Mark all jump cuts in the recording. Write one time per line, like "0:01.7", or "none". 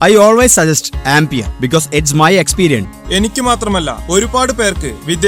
0:02.9